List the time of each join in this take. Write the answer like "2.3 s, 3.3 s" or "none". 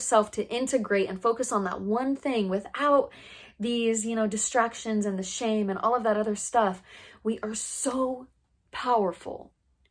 none